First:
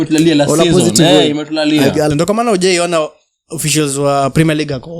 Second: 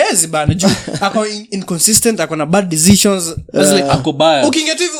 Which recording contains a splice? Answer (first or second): first